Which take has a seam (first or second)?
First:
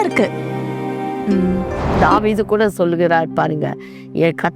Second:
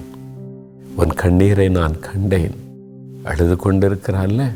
first